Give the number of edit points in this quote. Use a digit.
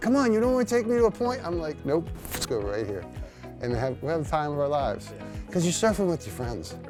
0